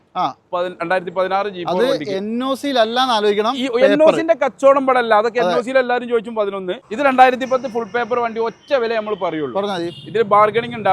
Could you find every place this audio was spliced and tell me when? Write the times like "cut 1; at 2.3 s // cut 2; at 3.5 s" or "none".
cut 1; at 6.8 s